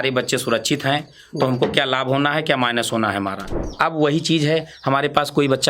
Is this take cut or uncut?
cut